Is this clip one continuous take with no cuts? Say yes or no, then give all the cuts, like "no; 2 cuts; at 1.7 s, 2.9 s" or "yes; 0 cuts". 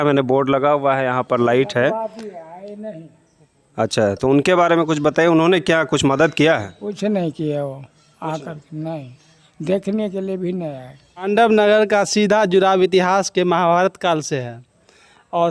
no; 1 cut; at 11.3 s